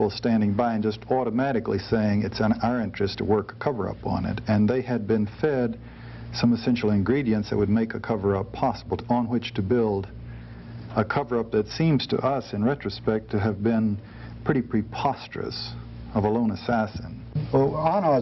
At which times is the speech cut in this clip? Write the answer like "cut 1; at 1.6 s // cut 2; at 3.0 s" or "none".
cut 1; at 17.3 s